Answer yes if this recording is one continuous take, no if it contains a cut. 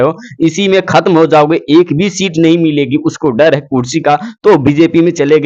yes